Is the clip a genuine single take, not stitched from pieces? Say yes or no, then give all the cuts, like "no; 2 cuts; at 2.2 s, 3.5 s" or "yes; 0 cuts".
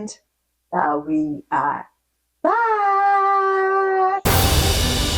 no; 1 cut; at 4.2 s